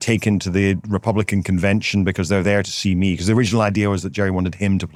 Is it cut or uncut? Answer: uncut